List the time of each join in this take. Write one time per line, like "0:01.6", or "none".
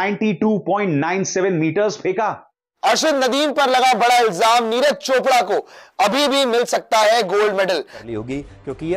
0:02.8
0:07.9